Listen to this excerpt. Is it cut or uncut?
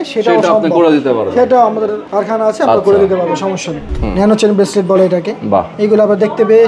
cut